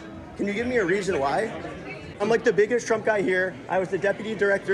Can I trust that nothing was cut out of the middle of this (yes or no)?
no